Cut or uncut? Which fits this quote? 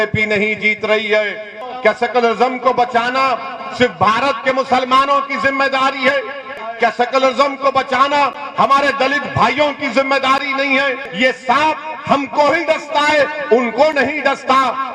cut